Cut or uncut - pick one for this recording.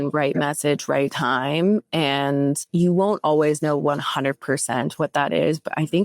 cut